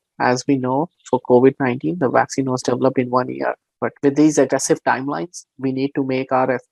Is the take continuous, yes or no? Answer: yes